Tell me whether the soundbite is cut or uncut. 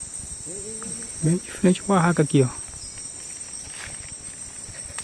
cut